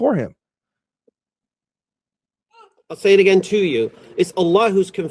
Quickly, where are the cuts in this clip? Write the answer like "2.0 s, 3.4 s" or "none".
none